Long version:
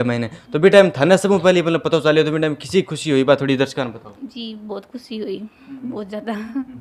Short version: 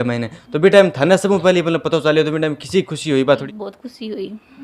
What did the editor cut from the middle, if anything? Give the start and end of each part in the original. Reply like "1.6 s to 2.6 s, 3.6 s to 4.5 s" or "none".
3.4 s to 4.5 s